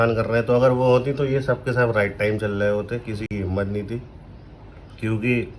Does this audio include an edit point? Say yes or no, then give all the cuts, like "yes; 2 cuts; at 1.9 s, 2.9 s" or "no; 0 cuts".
no; 0 cuts